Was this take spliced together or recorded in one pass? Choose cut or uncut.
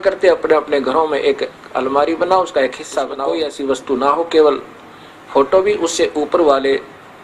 cut